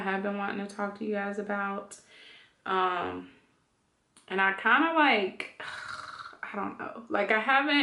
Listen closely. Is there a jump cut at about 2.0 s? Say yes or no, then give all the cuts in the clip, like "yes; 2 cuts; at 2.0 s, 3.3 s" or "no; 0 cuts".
no; 0 cuts